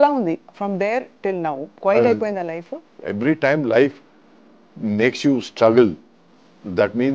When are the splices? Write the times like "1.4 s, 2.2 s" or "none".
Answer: 1.7 s, 2.8 s